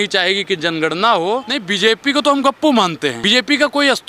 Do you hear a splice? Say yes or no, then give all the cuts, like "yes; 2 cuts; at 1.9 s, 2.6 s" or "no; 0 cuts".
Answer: yes; 2 cuts; at 1.5 s, 3.2 s